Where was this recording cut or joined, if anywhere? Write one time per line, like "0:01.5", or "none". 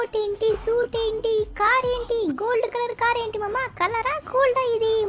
none

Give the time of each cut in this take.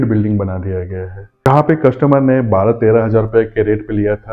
0:01.5

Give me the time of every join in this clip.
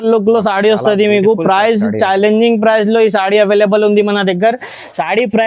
none

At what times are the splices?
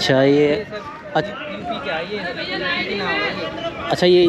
none

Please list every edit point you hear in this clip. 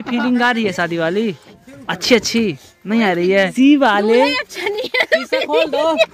0:03.5

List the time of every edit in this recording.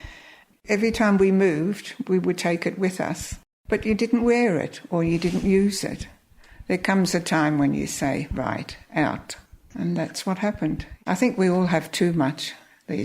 0:10.9

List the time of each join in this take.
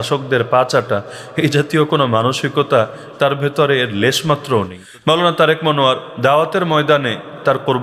0:04.8

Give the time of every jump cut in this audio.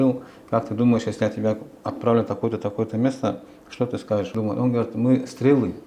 0:04.3

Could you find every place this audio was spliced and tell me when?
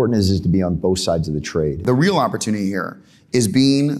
0:01.8

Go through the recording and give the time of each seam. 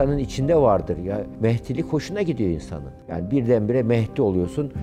none

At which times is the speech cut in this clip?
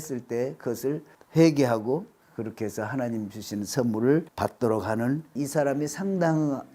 0:01.1
0:02.2
0:04.3
0:05.4

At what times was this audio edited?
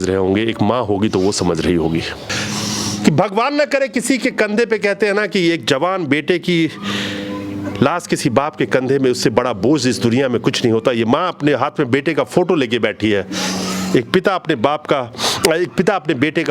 0:02.3

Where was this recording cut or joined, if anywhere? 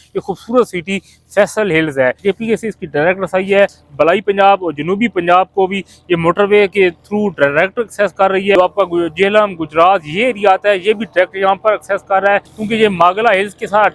0:02.2
0:03.8
0:08.6
0:12.5

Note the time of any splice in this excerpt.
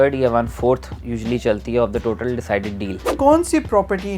0:03.1

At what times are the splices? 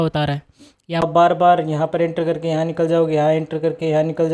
0:01.0

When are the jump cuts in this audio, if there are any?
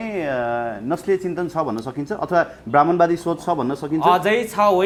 none

